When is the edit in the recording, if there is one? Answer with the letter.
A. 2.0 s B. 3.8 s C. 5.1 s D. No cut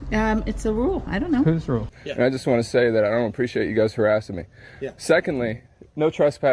A